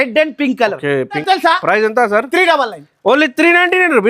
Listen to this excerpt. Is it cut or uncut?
cut